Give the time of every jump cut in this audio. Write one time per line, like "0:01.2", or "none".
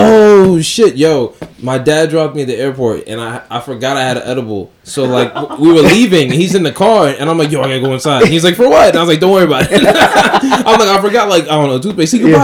none

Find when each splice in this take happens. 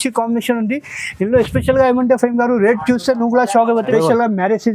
0:03.9

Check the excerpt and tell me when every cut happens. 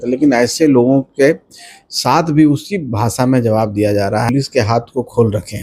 0:04.3

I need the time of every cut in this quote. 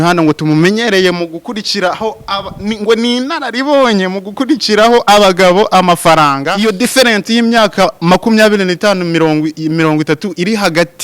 0:06.5

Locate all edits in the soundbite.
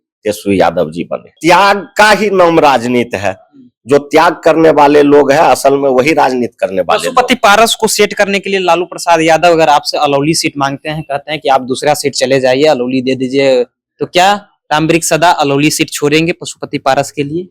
0:01.3

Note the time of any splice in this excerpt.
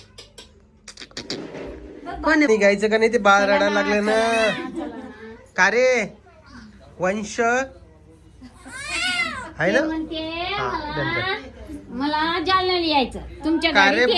0:02.5

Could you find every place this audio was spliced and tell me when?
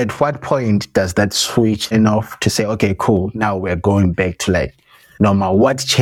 0:01.8

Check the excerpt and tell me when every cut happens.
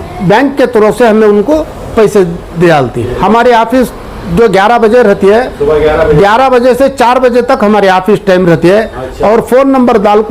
0:03.0

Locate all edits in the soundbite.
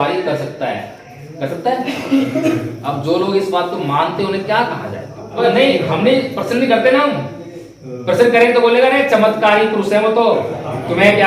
0:05.4

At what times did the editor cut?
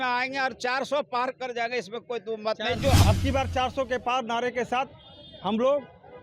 0:03.0

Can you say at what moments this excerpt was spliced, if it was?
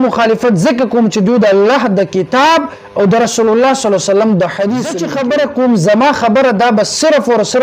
0:05.0

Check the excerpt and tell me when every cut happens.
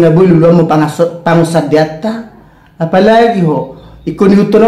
none

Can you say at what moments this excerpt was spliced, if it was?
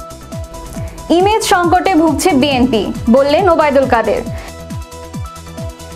0:01.1
0:04.2

